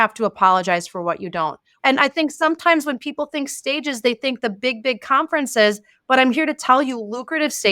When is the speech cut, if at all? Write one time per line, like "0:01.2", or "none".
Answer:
0:01.6